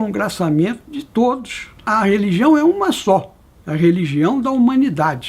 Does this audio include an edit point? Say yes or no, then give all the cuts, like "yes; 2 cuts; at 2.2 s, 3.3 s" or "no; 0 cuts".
yes; 1 cut; at 1.9 s